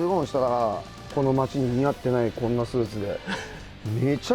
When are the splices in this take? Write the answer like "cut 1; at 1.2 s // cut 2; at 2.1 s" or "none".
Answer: cut 1; at 0.9 s